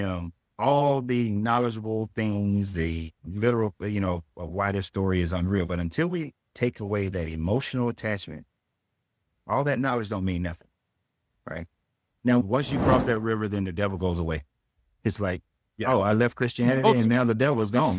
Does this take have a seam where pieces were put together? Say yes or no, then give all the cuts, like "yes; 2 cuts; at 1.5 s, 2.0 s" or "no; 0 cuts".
yes; 1 cut; at 12.4 s